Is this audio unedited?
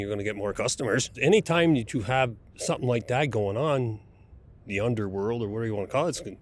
no; 1 cut; at 1.2 s

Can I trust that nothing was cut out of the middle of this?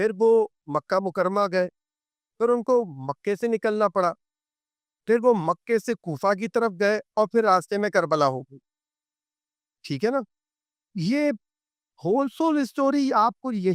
yes; 0 cuts

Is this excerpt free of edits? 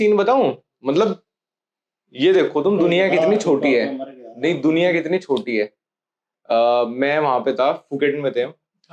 yes; 0 cuts

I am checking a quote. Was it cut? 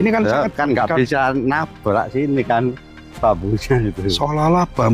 no; 0 cuts

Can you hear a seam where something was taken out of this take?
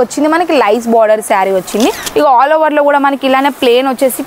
yes; 1 cut; at 2.0 s

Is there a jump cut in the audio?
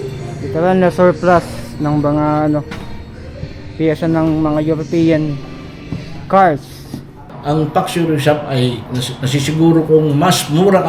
yes; 1 cut; at 7.2 s

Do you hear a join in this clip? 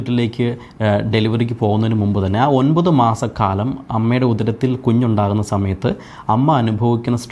no; 0 cuts

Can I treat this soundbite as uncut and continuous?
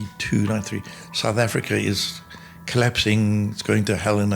yes; 0 cuts

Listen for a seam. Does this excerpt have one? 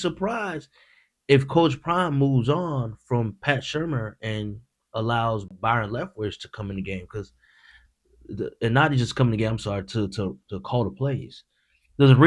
yes; 1 cut; at 5.5 s

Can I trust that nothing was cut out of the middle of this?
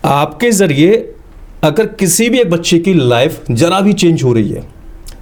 yes; 0 cuts

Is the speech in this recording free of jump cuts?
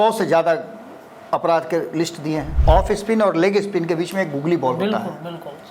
no; 1 cut; at 2.5 s

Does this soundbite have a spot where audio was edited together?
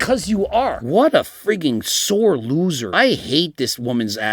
yes; 2 cuts; at 0.8 s, 2.8 s

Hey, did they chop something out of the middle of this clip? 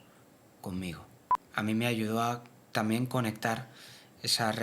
yes; 1 cut; at 1.3 s

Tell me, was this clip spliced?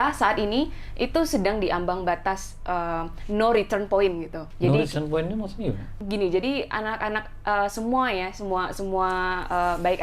yes; 2 cuts; at 4.4 s, 5.9 s

